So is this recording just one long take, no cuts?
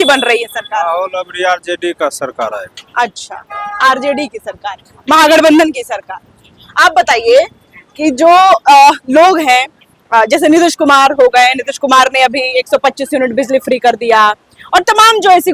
yes; 0 cuts

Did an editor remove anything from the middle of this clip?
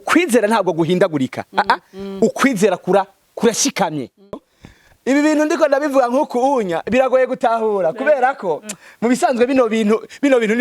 yes; 1 cut; at 4.2 s

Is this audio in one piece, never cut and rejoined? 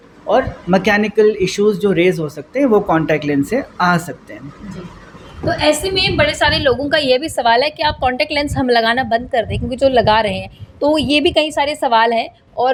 yes; 0 cuts

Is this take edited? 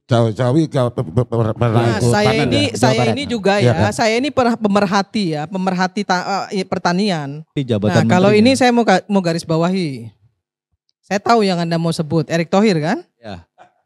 yes; 1 cut; at 7.6 s

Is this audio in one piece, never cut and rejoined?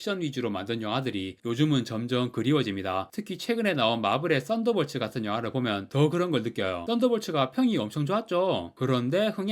yes; 0 cuts

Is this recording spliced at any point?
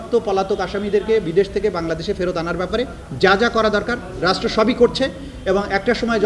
no; 0 cuts

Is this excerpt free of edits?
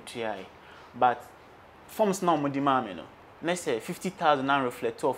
yes; 0 cuts

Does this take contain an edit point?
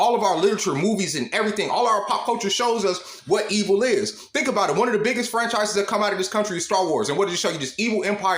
yes; 1 cut; at 4.2 s

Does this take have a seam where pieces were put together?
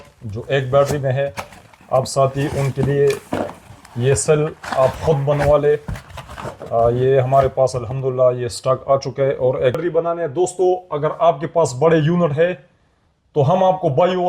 yes; 1 cut; at 9.8 s

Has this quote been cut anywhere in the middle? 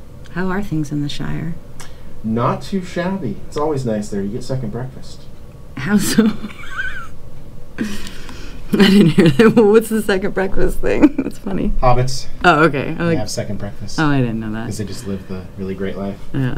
no; 0 cuts

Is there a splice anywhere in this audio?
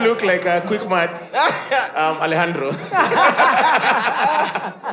no; 0 cuts

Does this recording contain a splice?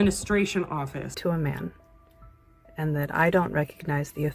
yes; 1 cut; at 1.2 s

